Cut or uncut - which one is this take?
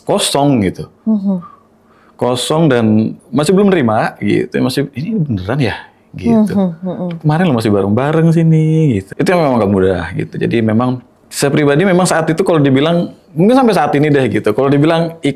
cut